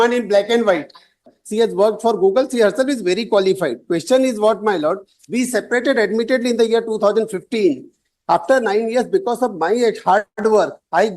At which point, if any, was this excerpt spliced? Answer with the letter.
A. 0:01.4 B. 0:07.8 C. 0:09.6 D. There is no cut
A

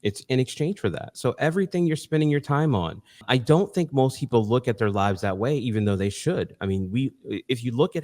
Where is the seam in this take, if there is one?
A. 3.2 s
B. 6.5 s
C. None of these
A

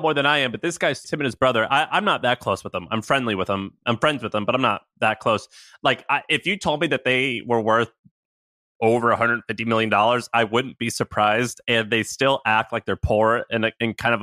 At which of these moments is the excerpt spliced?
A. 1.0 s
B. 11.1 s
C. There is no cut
A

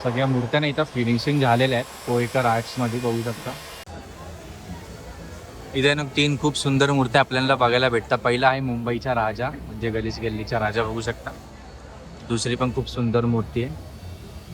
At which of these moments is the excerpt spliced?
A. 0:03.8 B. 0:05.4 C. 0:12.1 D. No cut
A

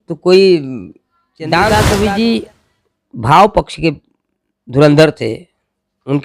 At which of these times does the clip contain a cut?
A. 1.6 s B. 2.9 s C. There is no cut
A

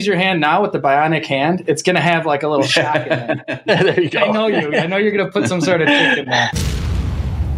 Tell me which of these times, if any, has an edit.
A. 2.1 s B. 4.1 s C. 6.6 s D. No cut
C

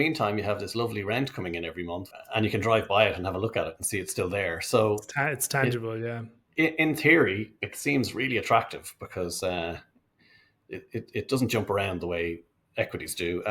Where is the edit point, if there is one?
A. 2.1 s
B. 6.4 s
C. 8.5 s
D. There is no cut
A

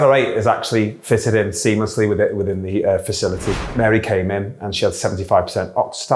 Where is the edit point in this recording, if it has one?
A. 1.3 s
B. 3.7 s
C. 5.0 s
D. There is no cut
B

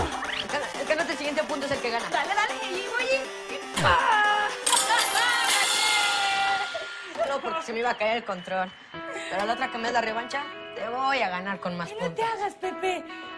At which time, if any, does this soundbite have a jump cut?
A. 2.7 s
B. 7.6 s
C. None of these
B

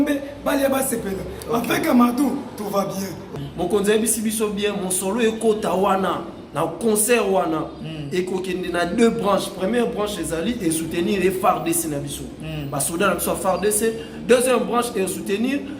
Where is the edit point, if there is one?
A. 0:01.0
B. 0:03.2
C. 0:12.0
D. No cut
B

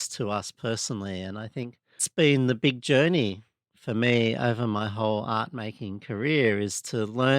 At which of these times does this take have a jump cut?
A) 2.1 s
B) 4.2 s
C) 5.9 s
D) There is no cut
A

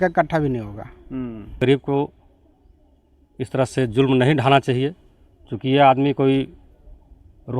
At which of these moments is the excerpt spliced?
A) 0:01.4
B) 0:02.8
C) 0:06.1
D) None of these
A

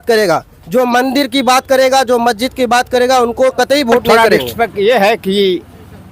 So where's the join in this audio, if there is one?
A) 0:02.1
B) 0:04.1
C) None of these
B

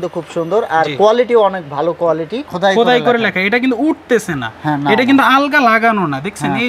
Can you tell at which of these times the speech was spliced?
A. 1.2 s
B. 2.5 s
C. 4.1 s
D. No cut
B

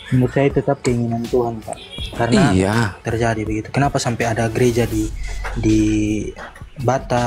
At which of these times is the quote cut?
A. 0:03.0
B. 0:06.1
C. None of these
A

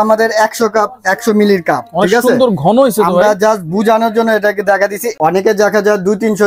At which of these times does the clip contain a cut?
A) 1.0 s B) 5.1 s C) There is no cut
B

